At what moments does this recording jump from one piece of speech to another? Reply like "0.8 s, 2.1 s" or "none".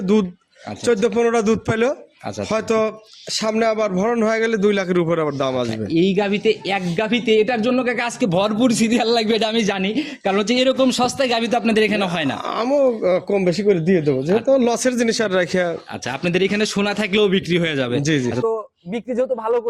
18.4 s